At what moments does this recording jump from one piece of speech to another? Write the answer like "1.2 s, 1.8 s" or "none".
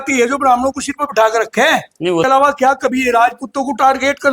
2.3 s